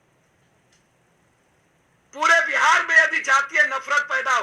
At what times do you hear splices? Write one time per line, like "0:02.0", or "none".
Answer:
0:02.7